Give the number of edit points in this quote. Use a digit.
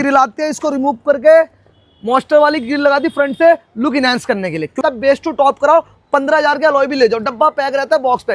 1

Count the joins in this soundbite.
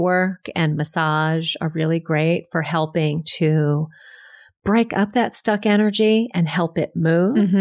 0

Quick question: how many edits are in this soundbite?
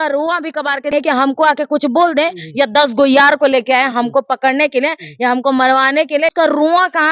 2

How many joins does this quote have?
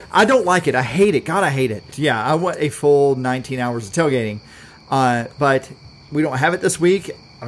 1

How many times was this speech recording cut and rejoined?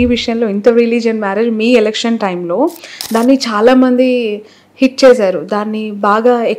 0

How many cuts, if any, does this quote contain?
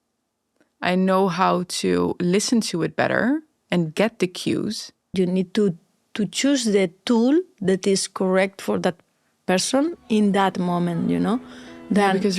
1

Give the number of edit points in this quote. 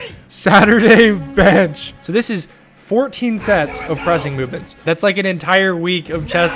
2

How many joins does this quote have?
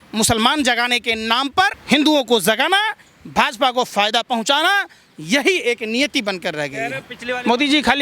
2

